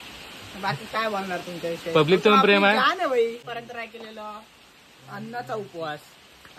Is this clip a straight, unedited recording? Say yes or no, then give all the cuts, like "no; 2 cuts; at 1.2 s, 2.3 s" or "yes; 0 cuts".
no; 1 cut; at 3.5 s